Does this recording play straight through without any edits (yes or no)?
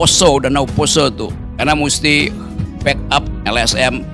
no